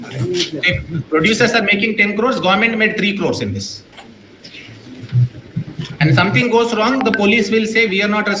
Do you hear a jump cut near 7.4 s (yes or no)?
no